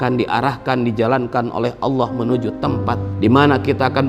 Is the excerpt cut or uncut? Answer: cut